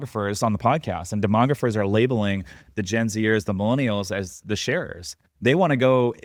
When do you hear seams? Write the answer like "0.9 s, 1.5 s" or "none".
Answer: none